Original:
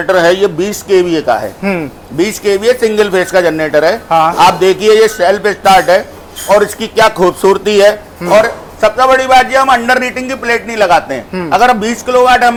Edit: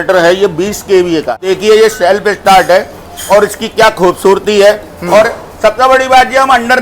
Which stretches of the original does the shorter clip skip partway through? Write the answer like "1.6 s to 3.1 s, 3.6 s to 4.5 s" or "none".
1.4 s to 4.6 s